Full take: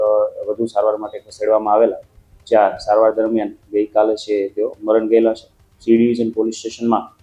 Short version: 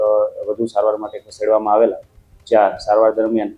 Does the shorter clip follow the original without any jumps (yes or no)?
yes